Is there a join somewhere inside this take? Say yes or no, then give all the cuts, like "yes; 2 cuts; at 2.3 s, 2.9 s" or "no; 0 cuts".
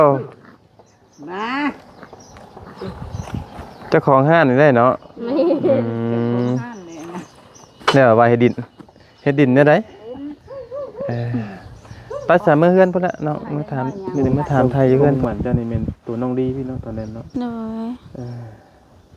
yes; 1 cut; at 15.2 s